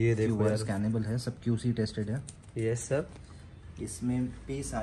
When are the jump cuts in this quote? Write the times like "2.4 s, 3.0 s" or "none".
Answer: none